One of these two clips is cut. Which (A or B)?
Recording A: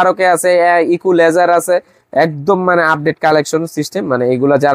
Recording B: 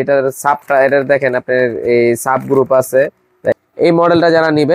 B